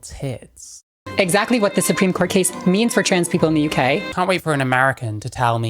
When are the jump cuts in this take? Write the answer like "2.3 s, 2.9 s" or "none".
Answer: 1.0 s, 4.1 s